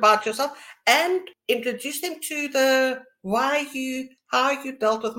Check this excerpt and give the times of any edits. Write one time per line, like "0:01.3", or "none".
0:01.3